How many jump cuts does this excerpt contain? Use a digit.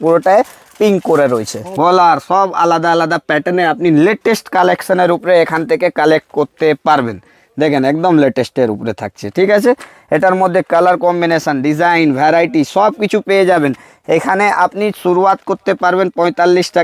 1